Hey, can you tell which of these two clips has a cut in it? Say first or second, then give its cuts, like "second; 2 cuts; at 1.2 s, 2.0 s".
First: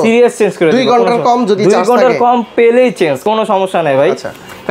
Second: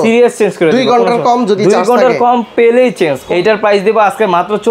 second; 1 cut; at 3.2 s